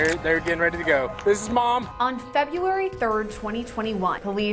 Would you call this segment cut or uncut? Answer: uncut